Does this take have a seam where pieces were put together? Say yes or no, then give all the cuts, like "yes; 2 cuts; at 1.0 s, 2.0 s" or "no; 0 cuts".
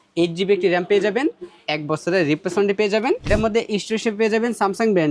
yes; 1 cut; at 3.2 s